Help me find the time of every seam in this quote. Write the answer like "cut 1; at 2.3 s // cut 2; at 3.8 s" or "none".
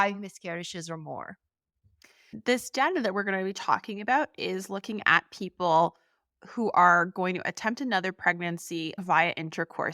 cut 1; at 2.3 s